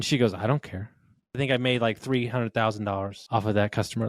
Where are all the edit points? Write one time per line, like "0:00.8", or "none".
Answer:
0:01.4
0:03.2